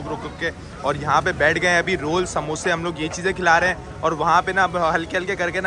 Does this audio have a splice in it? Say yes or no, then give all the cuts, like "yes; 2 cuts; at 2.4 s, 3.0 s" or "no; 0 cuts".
no; 0 cuts